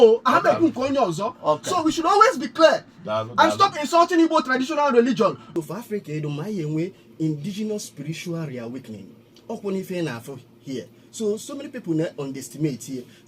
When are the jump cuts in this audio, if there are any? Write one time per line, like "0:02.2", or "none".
0:05.4